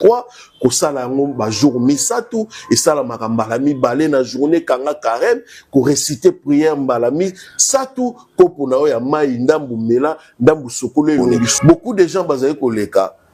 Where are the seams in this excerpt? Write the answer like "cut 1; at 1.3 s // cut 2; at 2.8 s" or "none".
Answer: cut 1; at 11.4 s